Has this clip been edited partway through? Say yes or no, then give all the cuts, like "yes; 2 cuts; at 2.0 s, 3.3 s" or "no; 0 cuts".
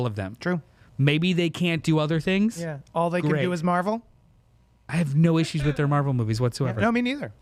no; 0 cuts